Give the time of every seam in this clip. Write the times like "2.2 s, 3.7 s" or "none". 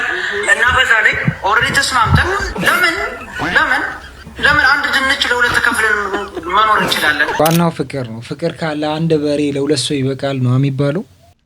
7.4 s